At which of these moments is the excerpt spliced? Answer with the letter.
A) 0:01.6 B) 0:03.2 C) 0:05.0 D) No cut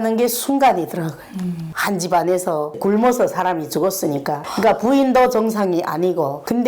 A